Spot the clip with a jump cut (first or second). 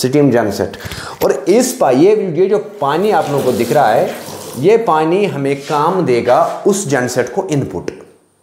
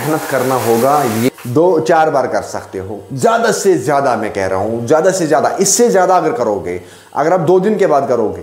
second